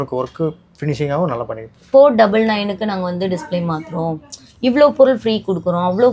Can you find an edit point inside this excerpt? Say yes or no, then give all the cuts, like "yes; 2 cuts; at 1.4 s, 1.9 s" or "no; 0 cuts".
yes; 1 cut; at 1.9 s